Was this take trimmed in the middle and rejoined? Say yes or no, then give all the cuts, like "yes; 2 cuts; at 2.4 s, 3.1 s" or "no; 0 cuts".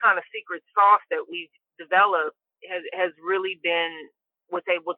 no; 0 cuts